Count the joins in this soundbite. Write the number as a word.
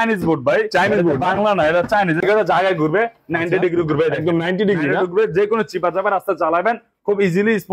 one